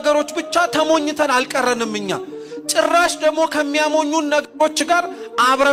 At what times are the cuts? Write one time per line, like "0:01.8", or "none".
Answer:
none